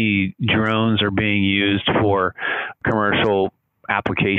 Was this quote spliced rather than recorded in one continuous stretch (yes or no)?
yes